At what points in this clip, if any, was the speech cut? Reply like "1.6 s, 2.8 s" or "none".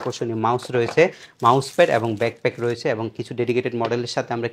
none